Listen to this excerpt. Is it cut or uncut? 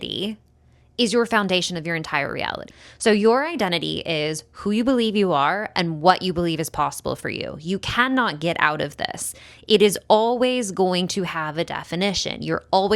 cut